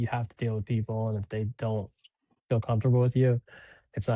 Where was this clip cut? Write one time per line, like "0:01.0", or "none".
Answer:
none